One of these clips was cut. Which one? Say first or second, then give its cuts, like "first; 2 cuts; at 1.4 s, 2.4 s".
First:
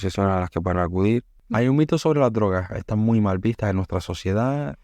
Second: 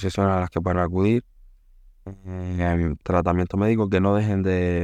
first; 1 cut; at 1.4 s